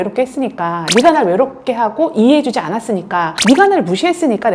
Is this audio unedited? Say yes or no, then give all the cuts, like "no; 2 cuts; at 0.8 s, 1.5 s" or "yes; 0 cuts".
yes; 0 cuts